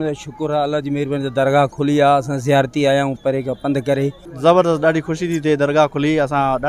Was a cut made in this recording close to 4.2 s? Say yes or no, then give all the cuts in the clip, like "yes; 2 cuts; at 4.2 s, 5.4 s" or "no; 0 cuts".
yes; 1 cut; at 4.2 s